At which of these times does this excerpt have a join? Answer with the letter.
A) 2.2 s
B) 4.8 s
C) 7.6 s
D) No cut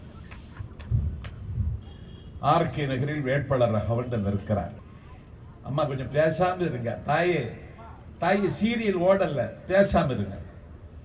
B